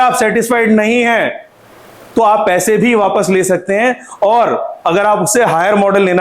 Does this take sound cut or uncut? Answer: uncut